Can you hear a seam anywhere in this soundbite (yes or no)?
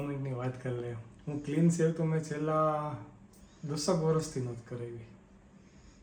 no